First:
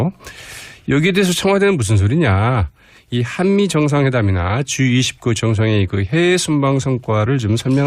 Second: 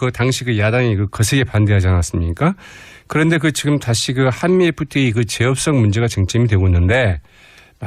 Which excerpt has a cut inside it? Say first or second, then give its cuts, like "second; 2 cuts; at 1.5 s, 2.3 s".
second; 1 cut; at 2.0 s